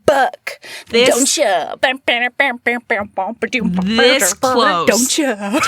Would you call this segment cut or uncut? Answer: uncut